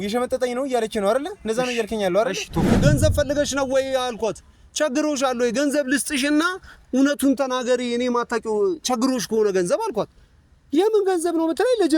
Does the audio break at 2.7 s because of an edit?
yes; 1 cut; at 2.7 s

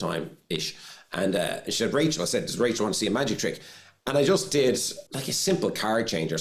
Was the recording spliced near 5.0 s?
yes; 1 cut; at 5.0 s

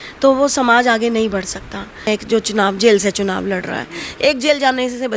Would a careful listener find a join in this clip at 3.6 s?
no; 1 cut; at 2.1 s

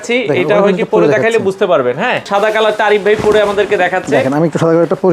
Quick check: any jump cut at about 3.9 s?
no; 1 cut; at 2.3 s

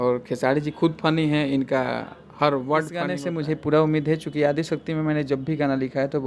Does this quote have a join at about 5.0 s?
no; 1 cut; at 3.2 s

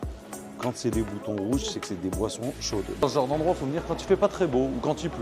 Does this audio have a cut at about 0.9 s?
no; 1 cut; at 3.0 s

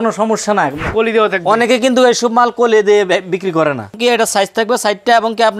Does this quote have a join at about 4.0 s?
yes; 2 cuts; at 0.8 s, 4.0 s

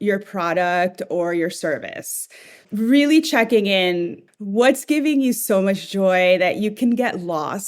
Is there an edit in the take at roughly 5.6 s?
no; 2 cuts; at 2.6 s, 4.2 s

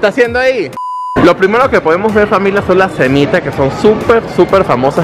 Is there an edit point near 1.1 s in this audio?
yes; 1 cut; at 1.1 s

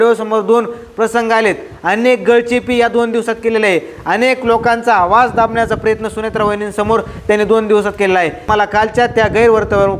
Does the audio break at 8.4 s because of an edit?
yes; 1 cut; at 8.4 s

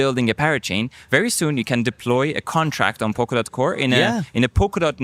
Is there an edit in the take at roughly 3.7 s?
no; 0 cuts

